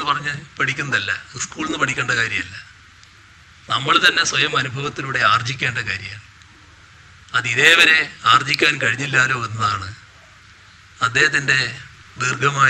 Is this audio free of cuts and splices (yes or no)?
yes